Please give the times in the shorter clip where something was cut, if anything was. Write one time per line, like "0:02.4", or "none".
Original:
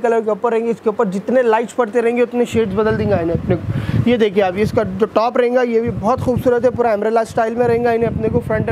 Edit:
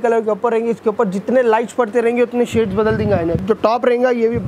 0:03.4